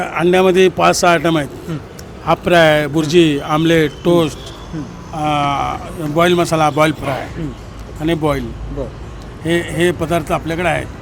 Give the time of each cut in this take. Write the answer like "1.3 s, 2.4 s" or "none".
none

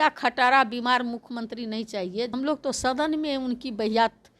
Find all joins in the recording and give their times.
2.3 s

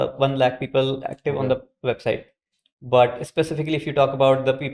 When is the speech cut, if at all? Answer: none

